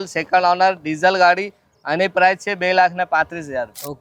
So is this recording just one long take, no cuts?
yes; 0 cuts

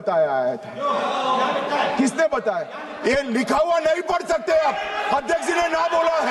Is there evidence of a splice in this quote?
no; 0 cuts

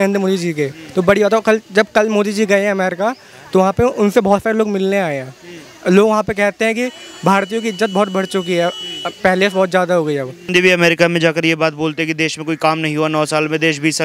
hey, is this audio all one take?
no; 1 cut; at 10.4 s

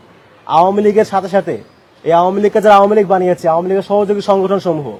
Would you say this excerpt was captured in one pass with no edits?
yes; 0 cuts

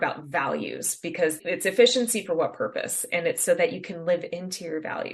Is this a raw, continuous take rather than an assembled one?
no; 1 cut; at 1.4 s

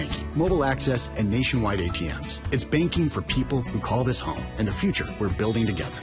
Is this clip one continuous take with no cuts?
yes; 0 cuts

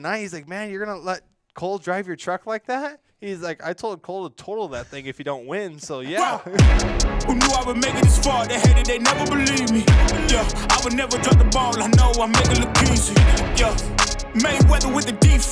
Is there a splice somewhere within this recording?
yes; 1 cut; at 6.2 s

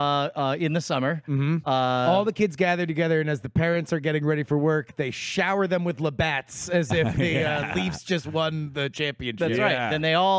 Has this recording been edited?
no; 0 cuts

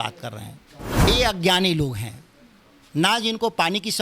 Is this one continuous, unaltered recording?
no; 1 cut; at 1.0 s

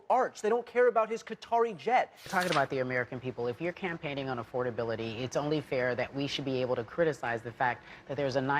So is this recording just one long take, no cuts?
no; 1 cut; at 2.3 s

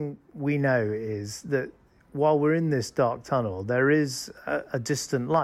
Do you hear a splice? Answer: no; 0 cuts

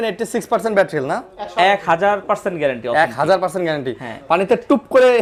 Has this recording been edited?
no; 0 cuts

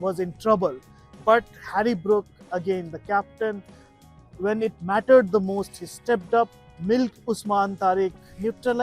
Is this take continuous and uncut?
no; 1 cut; at 6.7 s

